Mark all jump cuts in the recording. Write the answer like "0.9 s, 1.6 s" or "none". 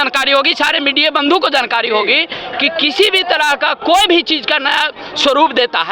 none